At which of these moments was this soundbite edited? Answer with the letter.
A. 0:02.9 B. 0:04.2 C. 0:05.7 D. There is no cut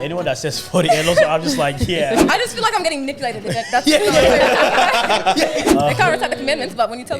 C